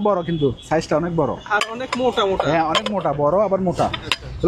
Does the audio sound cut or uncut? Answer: uncut